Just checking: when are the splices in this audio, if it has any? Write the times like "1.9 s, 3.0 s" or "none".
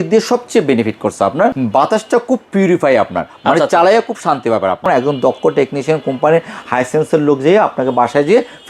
1.5 s, 4.9 s